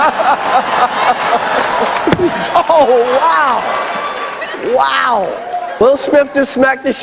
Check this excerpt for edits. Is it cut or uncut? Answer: cut